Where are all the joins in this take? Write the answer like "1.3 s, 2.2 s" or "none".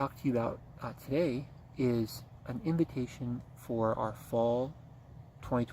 none